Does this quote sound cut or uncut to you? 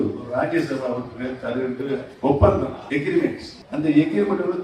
cut